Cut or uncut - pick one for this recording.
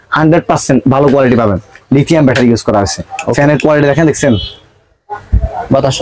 uncut